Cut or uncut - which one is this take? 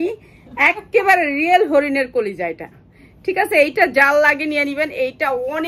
uncut